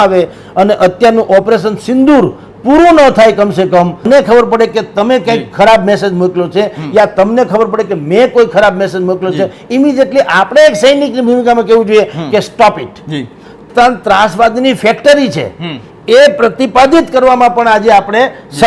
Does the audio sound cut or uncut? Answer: cut